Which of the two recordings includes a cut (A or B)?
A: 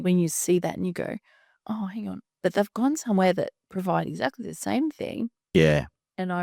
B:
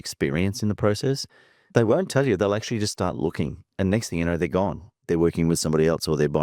B